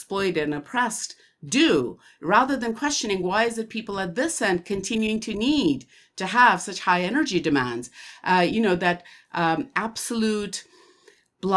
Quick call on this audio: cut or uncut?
uncut